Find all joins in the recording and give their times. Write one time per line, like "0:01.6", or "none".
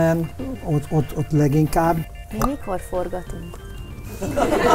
0:02.0